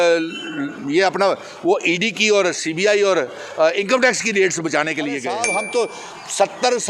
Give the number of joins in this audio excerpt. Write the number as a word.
one